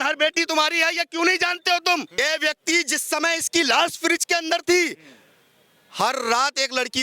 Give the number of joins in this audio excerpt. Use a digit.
1